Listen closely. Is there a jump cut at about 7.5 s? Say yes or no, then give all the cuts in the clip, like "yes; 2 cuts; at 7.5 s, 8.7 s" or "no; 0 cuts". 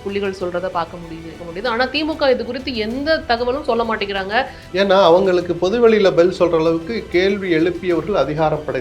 no; 2 cuts; at 1.4 s, 4.6 s